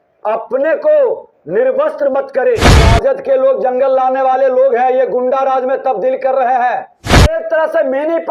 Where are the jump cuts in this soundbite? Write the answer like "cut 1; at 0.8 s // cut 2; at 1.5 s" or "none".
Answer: cut 1; at 2.8 s // cut 2; at 7.4 s